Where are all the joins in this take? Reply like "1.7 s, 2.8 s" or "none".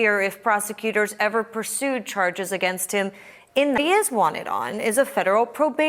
3.8 s